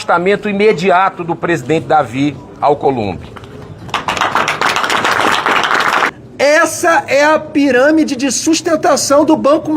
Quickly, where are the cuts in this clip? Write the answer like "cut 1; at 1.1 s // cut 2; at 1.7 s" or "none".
cut 1; at 6.1 s